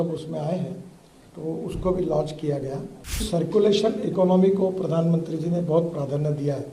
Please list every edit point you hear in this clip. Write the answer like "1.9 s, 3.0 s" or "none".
3.2 s